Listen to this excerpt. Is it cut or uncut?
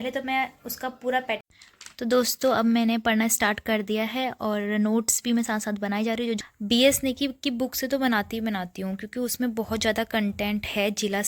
cut